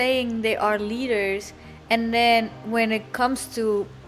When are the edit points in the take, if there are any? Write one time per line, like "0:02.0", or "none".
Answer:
none